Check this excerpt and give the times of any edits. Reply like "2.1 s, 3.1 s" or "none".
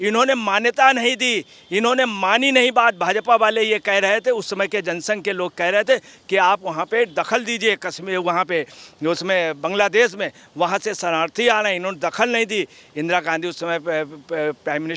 none